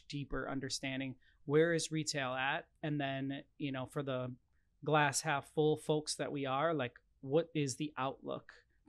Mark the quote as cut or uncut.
uncut